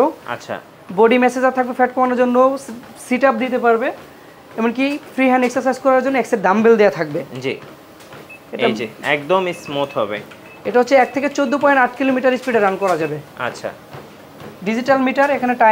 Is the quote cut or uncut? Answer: uncut